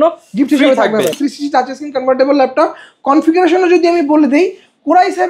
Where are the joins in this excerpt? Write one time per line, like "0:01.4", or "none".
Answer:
0:01.2